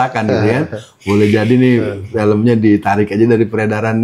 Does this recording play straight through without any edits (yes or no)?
yes